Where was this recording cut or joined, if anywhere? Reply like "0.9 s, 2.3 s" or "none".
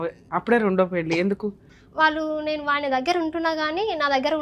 1.7 s